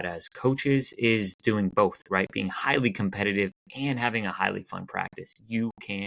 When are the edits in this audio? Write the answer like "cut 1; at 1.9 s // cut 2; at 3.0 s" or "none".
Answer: none